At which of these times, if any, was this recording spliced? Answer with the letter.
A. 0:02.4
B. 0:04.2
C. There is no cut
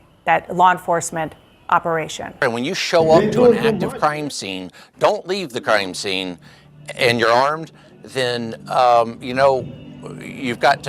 A